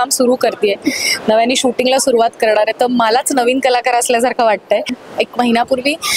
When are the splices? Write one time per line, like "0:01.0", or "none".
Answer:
0:05.0